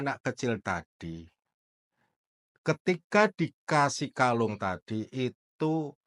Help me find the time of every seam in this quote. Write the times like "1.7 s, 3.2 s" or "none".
none